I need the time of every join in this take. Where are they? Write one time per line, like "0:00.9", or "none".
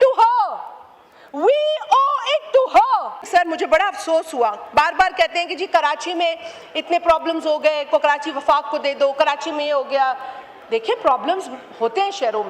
0:03.2